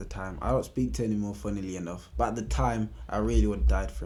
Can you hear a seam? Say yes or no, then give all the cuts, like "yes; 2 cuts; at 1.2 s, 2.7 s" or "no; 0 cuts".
no; 0 cuts